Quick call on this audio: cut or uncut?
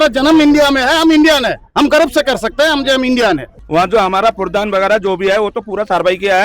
cut